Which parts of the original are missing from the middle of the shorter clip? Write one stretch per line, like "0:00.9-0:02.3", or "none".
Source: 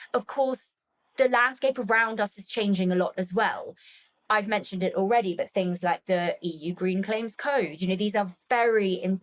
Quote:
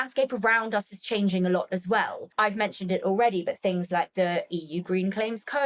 0:03.7-0:04.1